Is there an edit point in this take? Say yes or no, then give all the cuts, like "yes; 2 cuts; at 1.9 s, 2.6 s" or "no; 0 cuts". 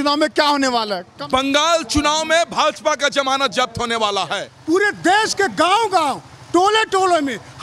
yes; 2 cuts; at 1.1 s, 4.5 s